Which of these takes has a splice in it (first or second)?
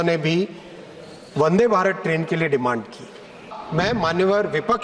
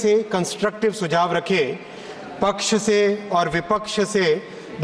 first